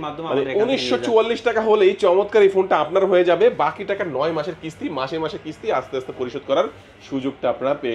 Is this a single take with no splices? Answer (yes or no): yes